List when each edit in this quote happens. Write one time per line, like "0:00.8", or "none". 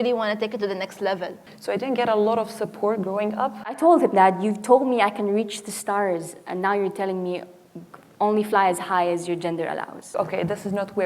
0:01.5
0:03.8
0:10.1